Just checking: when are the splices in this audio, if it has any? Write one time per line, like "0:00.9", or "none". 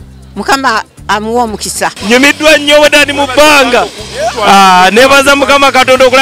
0:02.0